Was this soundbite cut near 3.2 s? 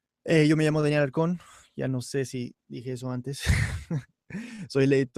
yes; 1 cut; at 3.2 s

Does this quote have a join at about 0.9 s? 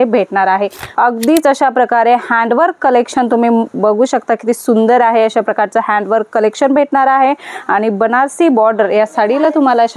yes; 1 cut; at 0.9 s

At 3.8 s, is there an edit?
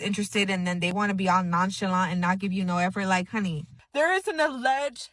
yes; 1 cut; at 3.8 s

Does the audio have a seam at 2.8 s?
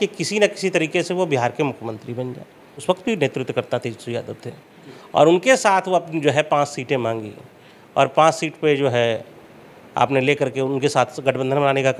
yes; 1 cut; at 2.8 s

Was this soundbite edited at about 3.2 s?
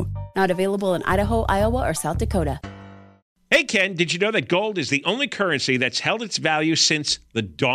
yes; 1 cut; at 3.2 s

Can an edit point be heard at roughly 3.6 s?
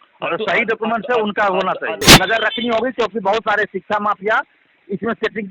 no; 1 cut; at 2.0 s

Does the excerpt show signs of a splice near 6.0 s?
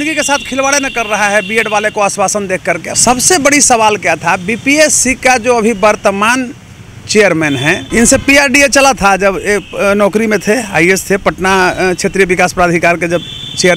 no; 2 cuts; at 2.9 s, 7.8 s

